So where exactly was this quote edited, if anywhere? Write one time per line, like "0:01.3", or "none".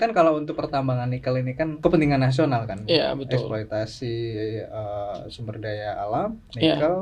0:01.7